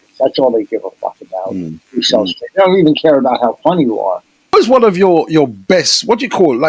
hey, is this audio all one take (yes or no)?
no